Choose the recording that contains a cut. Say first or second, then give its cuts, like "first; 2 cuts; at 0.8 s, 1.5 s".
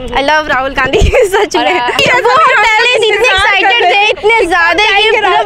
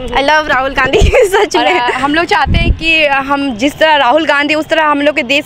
first; 1 cut; at 2.0 s